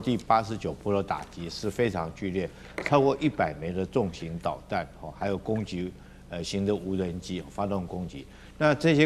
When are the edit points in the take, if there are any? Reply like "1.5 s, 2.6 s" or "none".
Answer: none